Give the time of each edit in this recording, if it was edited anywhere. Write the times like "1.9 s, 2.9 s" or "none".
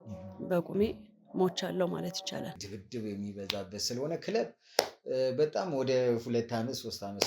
2.7 s